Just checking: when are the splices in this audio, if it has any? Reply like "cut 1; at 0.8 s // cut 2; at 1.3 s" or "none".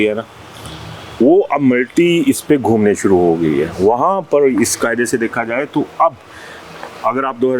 none